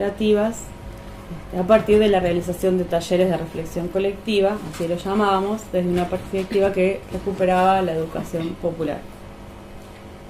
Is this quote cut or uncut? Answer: cut